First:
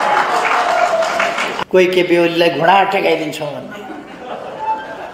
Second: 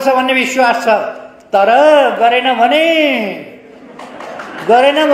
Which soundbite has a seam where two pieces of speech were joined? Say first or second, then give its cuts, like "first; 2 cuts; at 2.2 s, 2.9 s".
first; 1 cut; at 1.5 s